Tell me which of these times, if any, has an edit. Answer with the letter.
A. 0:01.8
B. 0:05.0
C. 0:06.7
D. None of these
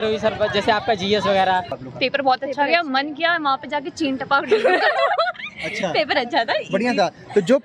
A